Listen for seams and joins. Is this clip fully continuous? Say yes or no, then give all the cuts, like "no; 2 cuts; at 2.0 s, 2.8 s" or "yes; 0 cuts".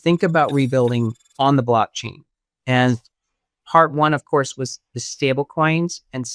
no; 1 cut; at 1.2 s